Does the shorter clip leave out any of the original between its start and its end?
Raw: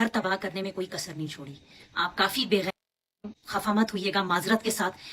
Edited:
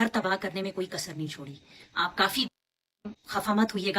yes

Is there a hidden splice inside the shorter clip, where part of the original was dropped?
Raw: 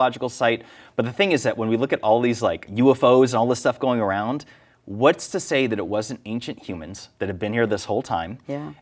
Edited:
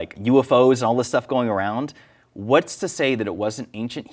no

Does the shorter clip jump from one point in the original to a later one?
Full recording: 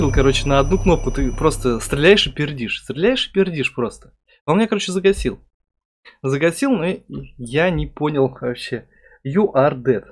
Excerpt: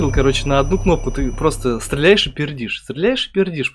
no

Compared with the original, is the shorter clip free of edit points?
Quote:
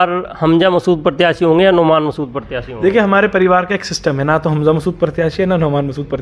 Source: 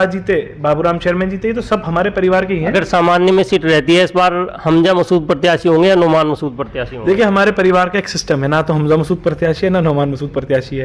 yes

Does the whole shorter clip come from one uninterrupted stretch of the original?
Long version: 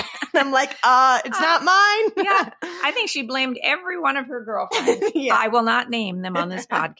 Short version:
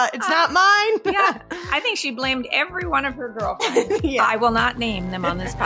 yes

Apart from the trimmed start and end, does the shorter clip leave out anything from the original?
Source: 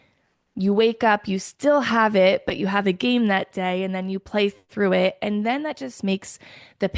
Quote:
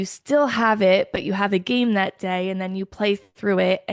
no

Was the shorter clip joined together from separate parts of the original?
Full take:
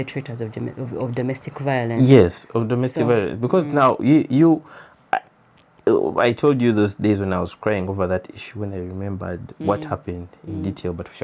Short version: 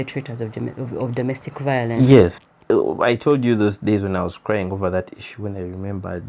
yes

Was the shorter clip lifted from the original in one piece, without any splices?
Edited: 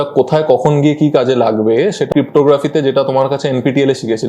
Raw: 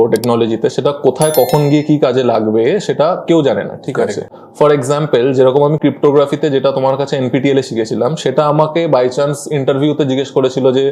no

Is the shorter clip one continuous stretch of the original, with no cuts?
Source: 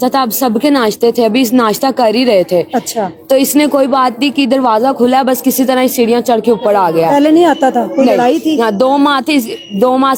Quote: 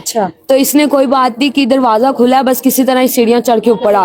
yes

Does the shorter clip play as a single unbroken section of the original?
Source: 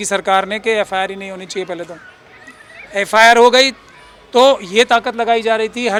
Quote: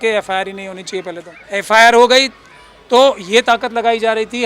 no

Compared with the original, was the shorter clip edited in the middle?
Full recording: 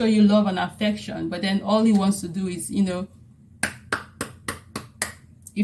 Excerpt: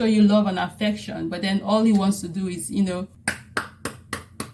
yes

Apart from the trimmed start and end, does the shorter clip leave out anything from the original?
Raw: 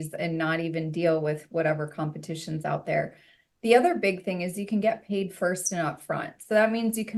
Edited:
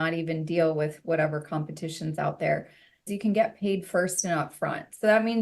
yes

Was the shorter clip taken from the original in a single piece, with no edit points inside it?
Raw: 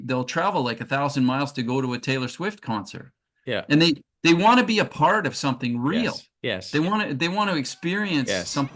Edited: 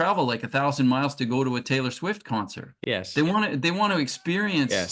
no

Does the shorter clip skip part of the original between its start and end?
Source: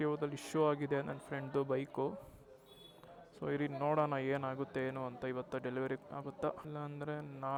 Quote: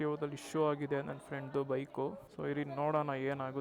yes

